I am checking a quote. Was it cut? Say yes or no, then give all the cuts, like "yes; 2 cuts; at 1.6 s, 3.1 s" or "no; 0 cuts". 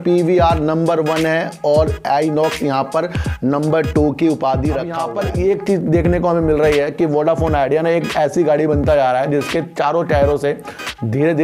yes; 1 cut; at 5.1 s